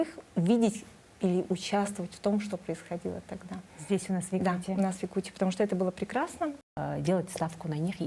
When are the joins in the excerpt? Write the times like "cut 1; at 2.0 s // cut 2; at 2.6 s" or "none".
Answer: cut 1; at 6.6 s